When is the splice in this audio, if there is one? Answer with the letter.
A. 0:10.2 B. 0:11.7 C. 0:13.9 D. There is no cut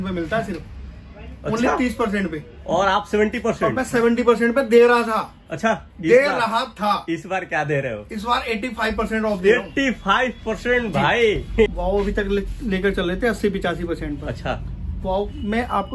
B